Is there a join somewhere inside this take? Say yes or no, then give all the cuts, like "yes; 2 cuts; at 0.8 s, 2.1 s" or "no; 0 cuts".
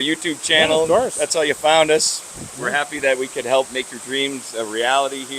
yes; 1 cut; at 3.7 s